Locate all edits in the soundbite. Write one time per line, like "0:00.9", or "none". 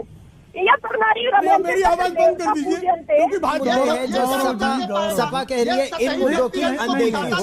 0:03.6